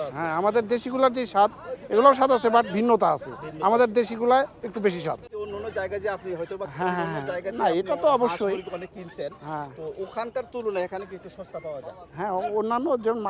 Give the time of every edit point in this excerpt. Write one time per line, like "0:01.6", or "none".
none

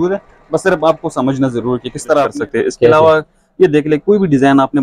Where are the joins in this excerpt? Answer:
0:02.3

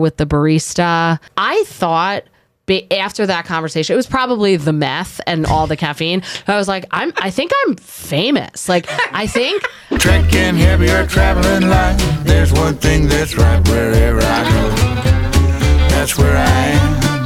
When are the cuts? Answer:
0:01.3
0:09.8

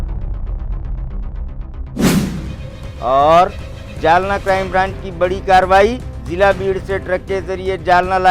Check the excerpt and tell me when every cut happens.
0:02.5

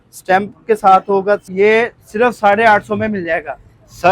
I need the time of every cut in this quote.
0:01.4

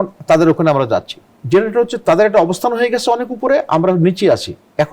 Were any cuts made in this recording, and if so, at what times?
none

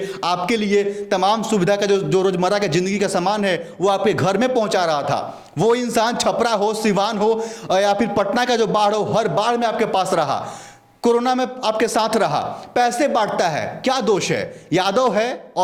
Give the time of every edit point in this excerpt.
none

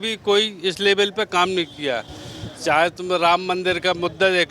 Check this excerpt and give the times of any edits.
none

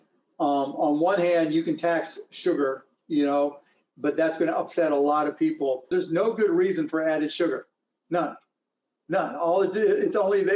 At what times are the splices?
0:05.9

